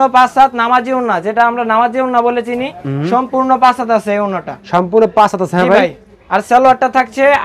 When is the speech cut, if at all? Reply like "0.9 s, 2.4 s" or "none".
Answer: none